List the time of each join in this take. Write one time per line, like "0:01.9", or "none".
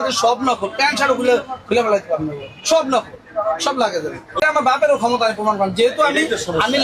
0:04.4